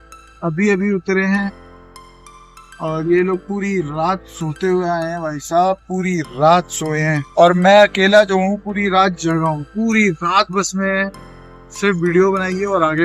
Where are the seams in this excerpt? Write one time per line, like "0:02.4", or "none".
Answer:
0:07.2